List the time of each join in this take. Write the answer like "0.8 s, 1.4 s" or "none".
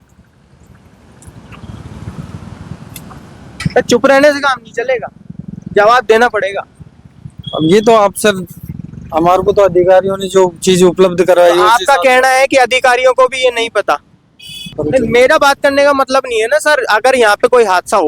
14.7 s